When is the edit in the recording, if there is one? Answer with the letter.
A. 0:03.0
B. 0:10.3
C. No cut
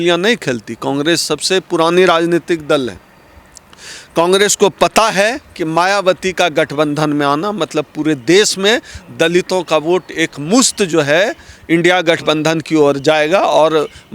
C